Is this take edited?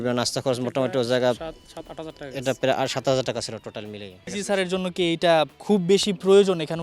yes; 1 cut; at 4.3 s

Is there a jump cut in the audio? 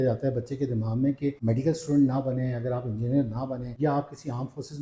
yes; 1 cut; at 1.4 s

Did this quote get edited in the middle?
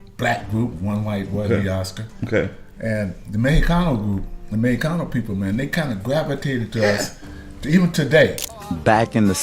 yes; 1 cut; at 8.5 s

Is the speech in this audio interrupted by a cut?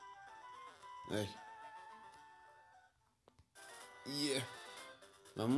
yes; 1 cut; at 0.9 s

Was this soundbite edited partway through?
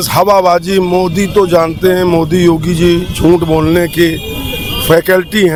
no; 0 cuts

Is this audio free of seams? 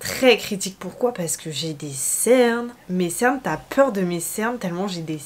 no; 1 cut; at 2.8 s

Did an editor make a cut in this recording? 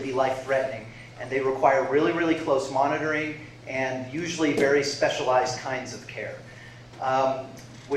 no; 0 cuts

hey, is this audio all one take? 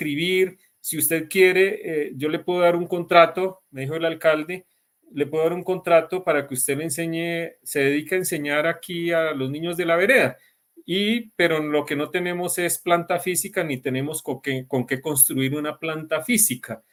yes; 0 cuts

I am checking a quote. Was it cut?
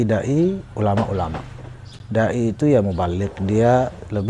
no; 0 cuts

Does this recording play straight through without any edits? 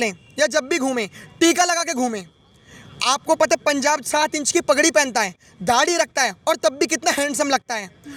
yes; 0 cuts

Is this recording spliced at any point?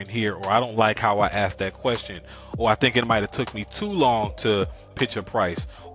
yes; 1 cut; at 4.9 s

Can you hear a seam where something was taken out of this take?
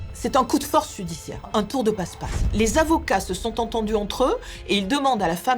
yes; 1 cut; at 1.5 s

